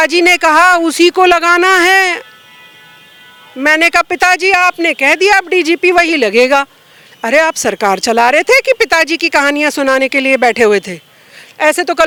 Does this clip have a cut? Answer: no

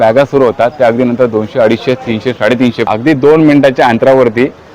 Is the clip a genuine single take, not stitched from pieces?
no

